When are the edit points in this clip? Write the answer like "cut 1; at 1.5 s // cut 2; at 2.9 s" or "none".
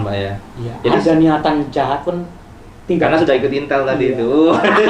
none